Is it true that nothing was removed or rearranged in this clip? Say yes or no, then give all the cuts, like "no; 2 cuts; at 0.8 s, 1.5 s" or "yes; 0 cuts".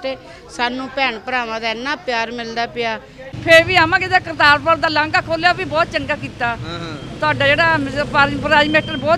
no; 1 cut; at 3.3 s